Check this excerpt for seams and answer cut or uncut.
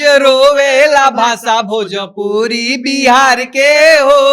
uncut